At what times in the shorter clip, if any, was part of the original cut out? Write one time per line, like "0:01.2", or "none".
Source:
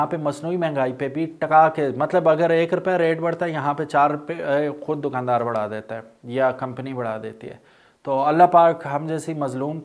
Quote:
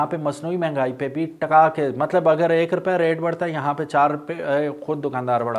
none